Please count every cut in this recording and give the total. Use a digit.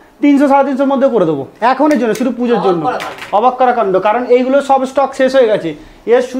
0